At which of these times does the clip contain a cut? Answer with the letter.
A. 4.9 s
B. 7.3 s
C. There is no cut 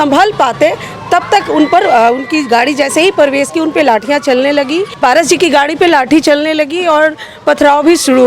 A